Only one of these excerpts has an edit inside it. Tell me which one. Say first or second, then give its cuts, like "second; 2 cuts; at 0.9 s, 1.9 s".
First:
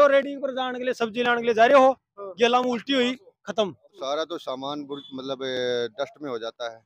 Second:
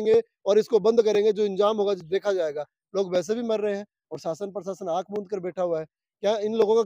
first; 1 cut; at 3.9 s